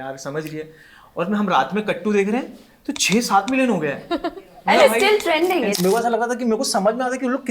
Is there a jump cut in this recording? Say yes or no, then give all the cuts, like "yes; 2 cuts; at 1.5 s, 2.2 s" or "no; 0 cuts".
yes; 1 cut; at 5.7 s